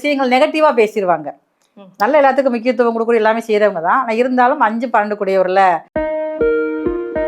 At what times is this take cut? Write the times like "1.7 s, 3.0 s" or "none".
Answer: 5.9 s